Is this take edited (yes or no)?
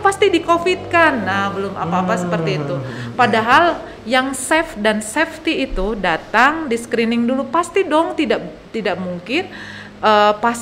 no